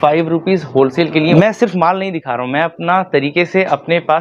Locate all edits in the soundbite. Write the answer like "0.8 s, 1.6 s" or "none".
1.3 s